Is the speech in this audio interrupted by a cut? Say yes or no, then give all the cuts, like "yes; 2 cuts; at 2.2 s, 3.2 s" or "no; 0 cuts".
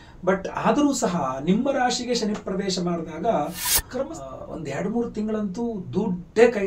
yes; 1 cut; at 4.1 s